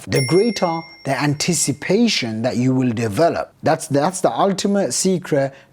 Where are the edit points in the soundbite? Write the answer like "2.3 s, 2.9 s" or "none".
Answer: 3.5 s